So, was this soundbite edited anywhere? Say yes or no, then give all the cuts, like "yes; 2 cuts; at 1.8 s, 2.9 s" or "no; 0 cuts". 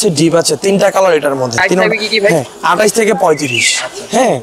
no; 0 cuts